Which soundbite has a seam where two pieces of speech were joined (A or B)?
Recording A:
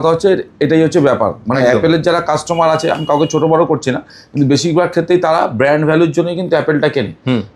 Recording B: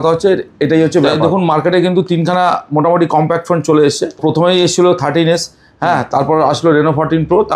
B